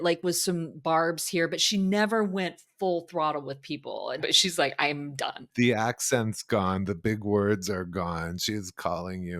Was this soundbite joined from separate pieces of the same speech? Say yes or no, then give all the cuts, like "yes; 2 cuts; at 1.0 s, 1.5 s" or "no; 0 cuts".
yes; 2 cuts; at 4.2 s, 5.5 s